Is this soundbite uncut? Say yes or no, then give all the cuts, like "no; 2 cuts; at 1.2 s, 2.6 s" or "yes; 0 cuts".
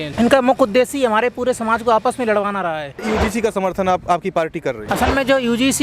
no; 2 cuts; at 3.0 s, 4.9 s